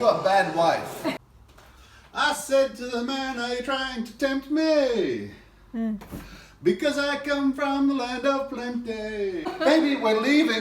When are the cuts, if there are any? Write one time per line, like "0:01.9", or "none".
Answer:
0:01.2
0:09.5